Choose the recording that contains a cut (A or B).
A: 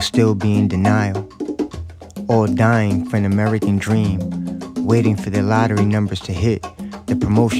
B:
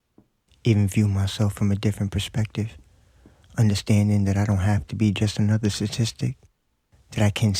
B